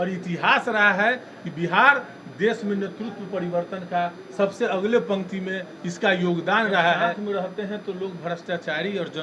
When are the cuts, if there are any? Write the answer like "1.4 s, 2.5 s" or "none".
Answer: 7.2 s